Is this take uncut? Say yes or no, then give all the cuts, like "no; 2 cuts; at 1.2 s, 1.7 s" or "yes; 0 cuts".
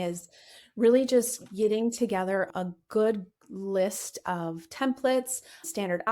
no; 1 cut; at 2.5 s